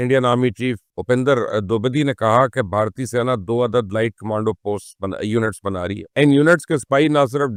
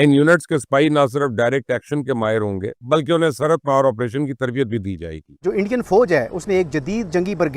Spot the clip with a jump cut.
second; 1 cut; at 5.4 s

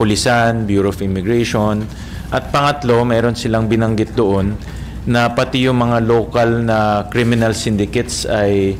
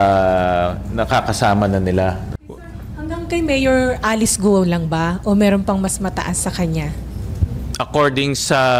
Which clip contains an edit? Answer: second; 1 cut; at 2.3 s

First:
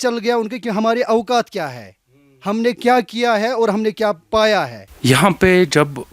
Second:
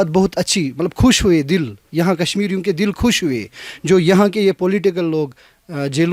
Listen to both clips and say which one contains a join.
first; 1 cut; at 4.8 s

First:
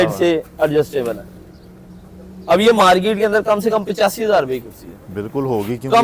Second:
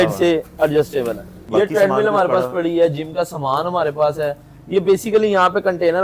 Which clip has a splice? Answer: second; 1 cut; at 1.4 s

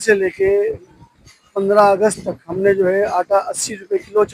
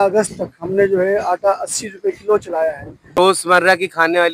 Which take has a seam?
second; 1 cut; at 3.4 s

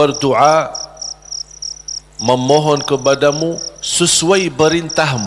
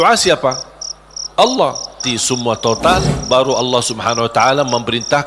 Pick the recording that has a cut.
second; 1 cut; at 2.1 s

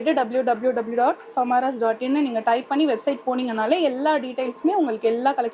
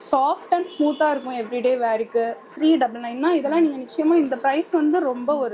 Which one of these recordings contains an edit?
second; 1 cut; at 2.4 s

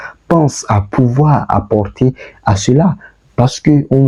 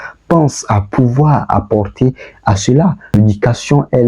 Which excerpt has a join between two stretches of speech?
second; 1 cut; at 3.0 s

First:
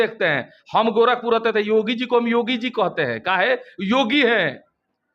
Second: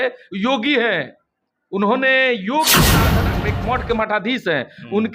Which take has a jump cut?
second; 1 cut; at 3.1 s

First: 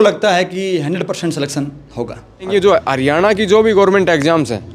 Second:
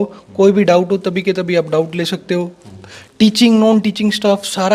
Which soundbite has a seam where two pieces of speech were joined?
first; 1 cut; at 2.5 s

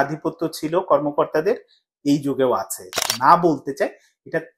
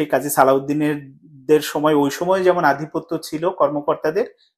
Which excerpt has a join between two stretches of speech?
first; 1 cut; at 3.1 s

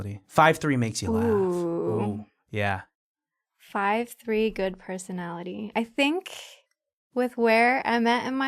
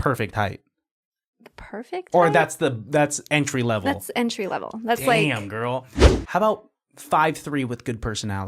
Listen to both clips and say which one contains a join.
second; 1 cut; at 6.0 s

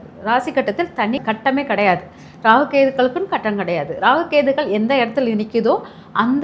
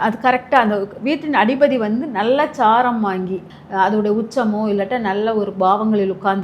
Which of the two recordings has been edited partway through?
second; 1 cut; at 3.5 s

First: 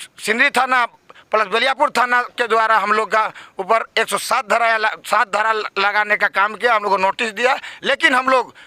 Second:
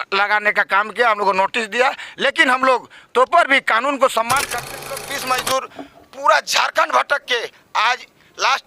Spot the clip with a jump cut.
second; 1 cut; at 4.8 s

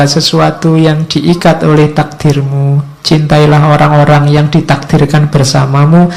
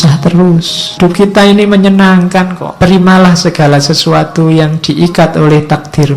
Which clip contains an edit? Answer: second; 2 cuts; at 1.0 s, 2.6 s

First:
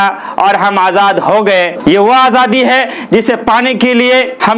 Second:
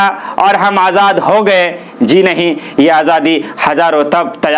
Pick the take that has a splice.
first; 1 cut; at 1.7 s

